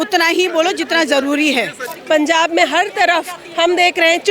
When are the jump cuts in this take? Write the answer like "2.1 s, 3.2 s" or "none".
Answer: 1.9 s